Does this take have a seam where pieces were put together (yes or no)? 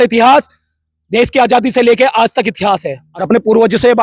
yes